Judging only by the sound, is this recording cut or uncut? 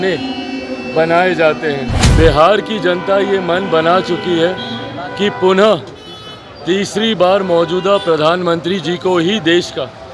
cut